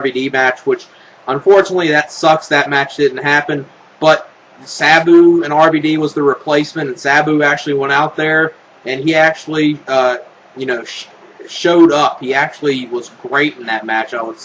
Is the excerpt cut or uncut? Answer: cut